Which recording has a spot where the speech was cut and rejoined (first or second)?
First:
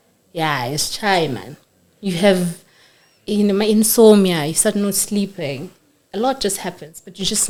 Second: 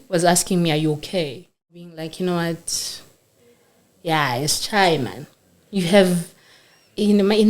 second